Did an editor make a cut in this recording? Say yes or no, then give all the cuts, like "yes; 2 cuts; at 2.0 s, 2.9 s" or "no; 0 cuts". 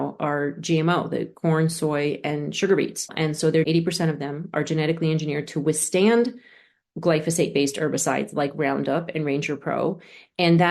yes; 1 cut; at 3.5 s